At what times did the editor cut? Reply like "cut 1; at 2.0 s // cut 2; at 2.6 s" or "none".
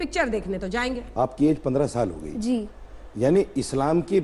cut 1; at 1.0 s

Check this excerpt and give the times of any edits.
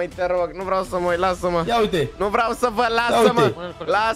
none

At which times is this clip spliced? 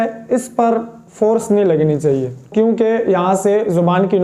cut 1; at 2.5 s

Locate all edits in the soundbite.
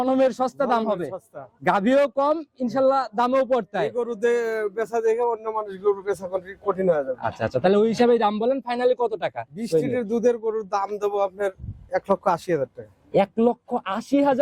none

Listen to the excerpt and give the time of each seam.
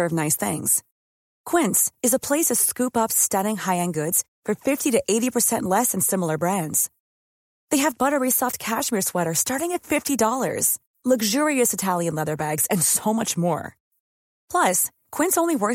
none

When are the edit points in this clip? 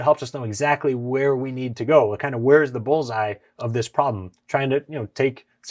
none

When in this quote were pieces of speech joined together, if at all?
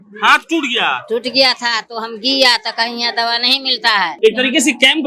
cut 1; at 4.1 s

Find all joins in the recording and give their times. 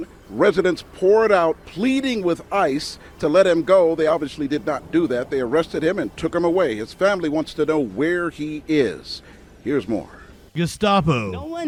none

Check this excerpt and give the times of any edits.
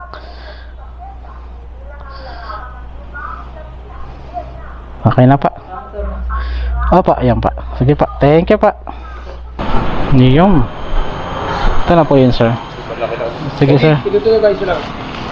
cut 1; at 9.6 s

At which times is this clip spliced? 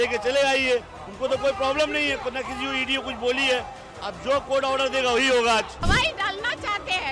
cut 1; at 5.9 s

